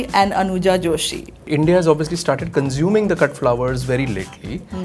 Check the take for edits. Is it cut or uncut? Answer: cut